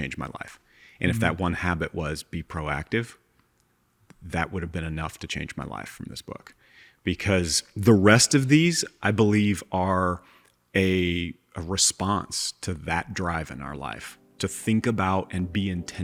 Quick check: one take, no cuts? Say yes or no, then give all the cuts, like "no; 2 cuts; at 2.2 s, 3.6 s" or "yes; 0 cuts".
yes; 0 cuts